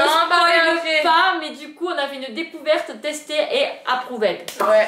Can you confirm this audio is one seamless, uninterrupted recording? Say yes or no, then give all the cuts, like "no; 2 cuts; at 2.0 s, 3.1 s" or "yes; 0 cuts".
yes; 0 cuts